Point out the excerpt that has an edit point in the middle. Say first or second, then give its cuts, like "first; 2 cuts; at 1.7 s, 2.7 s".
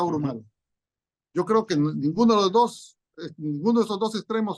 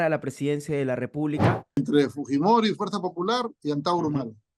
second; 1 cut; at 1.8 s